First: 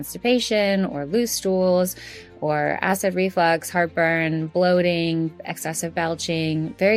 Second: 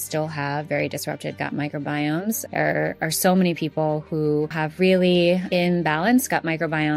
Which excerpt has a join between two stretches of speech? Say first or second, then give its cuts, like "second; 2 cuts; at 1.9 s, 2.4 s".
second; 3 cuts; at 2.4 s, 4.6 s, 5.4 s